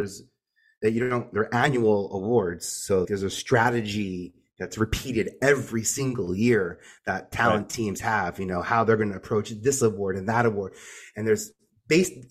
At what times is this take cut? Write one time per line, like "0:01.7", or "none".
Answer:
0:01.3
0:03.1